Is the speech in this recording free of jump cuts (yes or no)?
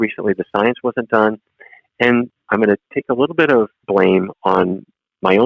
no